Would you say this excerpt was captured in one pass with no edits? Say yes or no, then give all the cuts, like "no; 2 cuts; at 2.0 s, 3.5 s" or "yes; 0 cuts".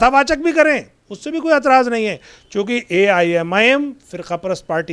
yes; 0 cuts